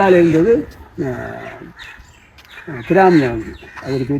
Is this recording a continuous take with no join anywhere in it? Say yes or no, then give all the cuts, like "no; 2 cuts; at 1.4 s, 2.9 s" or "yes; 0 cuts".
yes; 0 cuts